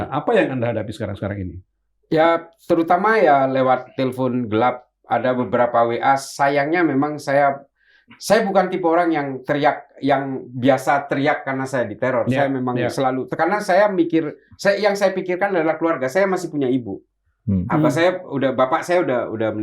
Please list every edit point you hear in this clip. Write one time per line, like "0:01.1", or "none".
none